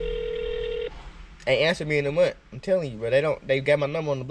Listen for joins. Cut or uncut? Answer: uncut